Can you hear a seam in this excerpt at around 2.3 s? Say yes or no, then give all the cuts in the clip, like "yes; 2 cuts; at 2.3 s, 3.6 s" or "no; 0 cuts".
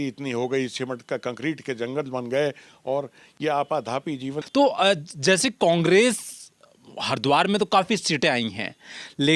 no; 1 cut; at 4.4 s